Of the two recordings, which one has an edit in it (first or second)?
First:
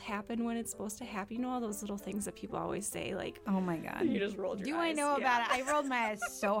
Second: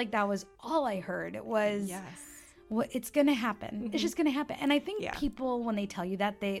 first